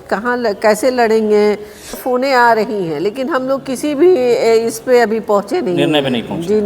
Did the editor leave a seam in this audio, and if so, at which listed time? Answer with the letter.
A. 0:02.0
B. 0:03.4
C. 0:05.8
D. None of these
A